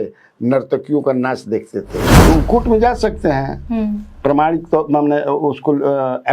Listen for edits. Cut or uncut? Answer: cut